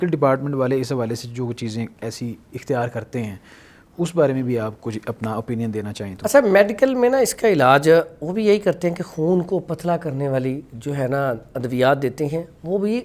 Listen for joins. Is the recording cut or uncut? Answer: uncut